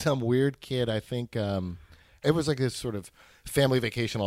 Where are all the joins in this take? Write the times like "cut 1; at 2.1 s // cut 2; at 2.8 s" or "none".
cut 1; at 2.2 s